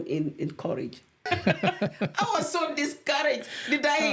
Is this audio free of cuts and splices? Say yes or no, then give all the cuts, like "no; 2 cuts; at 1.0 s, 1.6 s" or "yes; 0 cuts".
no; 1 cut; at 1.2 s